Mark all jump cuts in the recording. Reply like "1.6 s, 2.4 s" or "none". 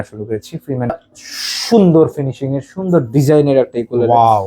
0.9 s